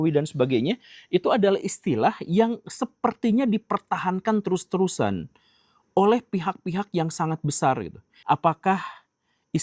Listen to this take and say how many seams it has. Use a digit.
1